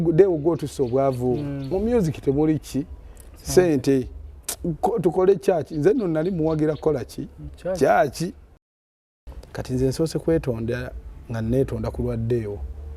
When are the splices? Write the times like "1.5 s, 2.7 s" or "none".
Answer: 9.1 s